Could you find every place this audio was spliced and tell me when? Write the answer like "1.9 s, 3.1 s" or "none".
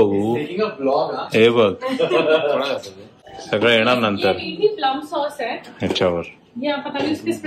none